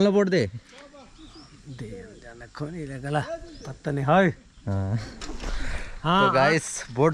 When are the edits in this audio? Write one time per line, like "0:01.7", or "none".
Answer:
none